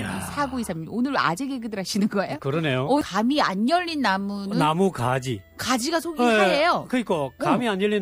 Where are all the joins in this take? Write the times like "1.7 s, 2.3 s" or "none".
3.0 s